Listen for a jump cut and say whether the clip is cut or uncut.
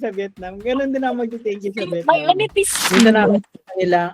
cut